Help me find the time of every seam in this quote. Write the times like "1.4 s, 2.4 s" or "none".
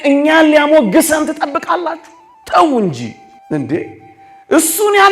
3.3 s